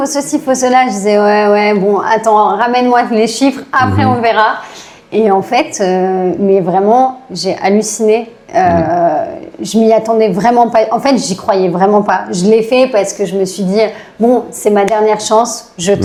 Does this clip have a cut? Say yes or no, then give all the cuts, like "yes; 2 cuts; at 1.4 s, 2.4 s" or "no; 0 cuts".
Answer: no; 0 cuts